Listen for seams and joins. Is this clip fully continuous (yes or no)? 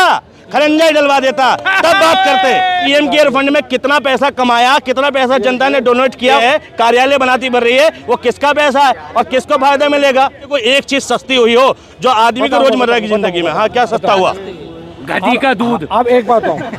no